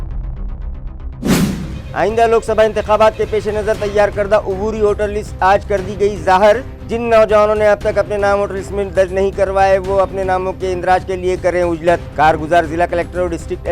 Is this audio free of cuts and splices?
no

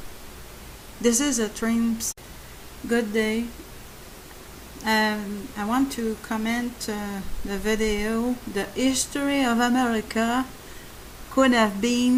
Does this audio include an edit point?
no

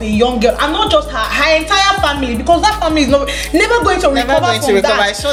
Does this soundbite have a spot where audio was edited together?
no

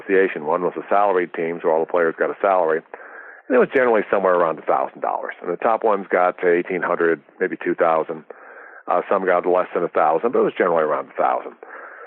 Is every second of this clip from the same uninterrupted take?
yes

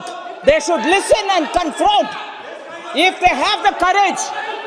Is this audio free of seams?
yes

